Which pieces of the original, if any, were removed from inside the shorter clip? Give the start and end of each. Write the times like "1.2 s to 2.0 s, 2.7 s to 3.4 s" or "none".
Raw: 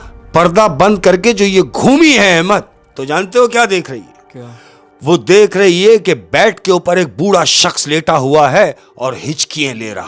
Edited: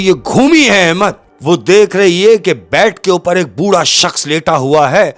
2.8 s to 4.9 s